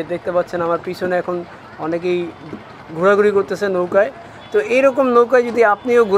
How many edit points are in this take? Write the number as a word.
zero